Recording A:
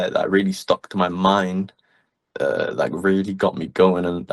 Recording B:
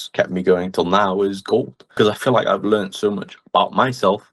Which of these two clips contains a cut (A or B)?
B